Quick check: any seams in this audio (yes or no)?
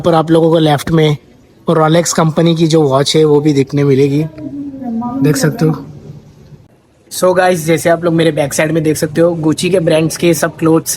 no